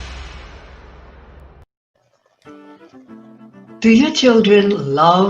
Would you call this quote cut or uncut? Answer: cut